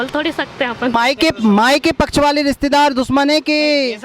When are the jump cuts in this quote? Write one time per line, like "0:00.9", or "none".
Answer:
0:00.9